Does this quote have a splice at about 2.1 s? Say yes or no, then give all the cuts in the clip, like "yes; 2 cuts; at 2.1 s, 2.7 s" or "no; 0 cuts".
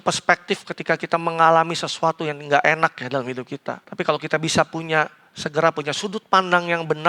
no; 1 cut; at 3.8 s